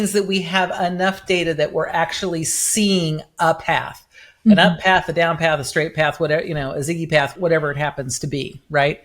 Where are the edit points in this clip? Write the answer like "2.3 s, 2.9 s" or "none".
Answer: 7.3 s